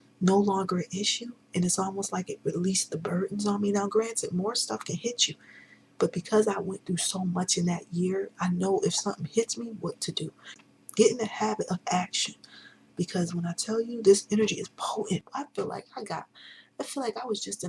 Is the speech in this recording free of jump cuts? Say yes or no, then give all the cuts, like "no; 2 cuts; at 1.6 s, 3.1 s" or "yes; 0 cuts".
no; 2 cuts; at 10.5 s, 15.2 s